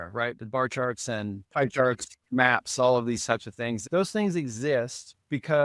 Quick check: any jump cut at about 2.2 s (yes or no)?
yes